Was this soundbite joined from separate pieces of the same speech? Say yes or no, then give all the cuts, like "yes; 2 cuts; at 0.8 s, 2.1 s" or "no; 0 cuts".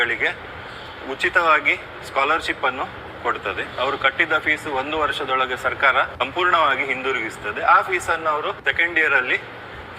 yes; 2 cuts; at 6.1 s, 8.6 s